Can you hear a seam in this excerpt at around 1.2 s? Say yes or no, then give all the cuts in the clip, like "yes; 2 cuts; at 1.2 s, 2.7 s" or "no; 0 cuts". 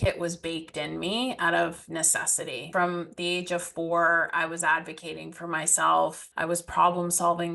no; 2 cuts; at 2.7 s, 6.3 s